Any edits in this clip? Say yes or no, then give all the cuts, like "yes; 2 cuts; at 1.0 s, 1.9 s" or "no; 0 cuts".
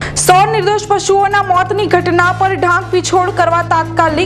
no; 0 cuts